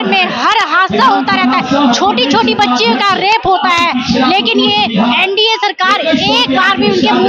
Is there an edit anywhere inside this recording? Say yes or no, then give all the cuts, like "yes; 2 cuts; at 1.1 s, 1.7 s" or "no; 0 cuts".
no; 0 cuts